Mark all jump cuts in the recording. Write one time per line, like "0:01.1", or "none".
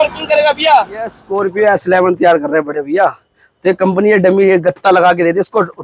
0:01.2